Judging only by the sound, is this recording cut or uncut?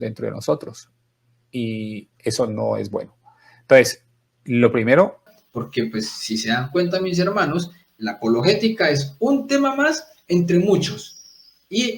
cut